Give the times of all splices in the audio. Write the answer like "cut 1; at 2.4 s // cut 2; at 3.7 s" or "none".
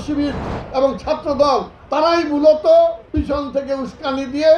none